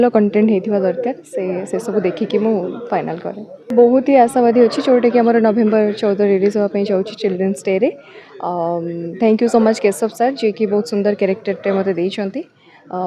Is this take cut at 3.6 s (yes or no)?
yes